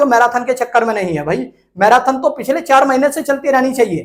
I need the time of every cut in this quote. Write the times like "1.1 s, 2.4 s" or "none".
none